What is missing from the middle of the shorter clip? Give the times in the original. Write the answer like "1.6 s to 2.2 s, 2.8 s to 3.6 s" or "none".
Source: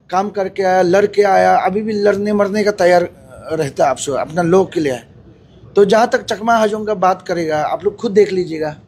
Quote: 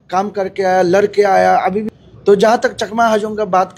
1.9 s to 5.4 s